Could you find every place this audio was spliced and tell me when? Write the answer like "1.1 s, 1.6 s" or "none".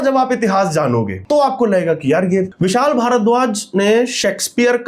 1.2 s, 2.5 s